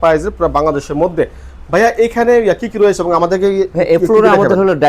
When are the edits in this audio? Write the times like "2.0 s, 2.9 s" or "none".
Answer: none